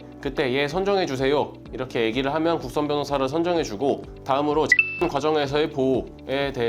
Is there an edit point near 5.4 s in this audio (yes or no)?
no